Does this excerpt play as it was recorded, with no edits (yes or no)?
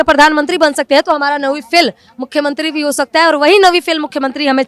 yes